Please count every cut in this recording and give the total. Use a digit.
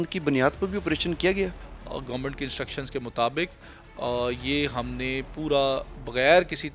1